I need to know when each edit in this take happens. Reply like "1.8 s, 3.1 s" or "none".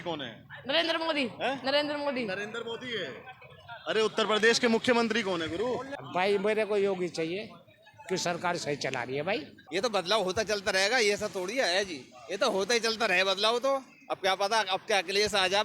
6.0 s, 9.6 s